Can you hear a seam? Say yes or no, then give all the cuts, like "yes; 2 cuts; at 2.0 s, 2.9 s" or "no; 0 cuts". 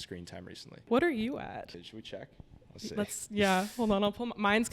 yes; 2 cuts; at 0.8 s, 1.7 s